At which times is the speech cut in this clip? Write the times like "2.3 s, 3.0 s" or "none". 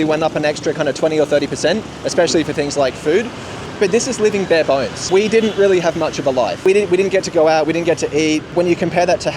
3.6 s, 5.0 s, 6.6 s, 8.5 s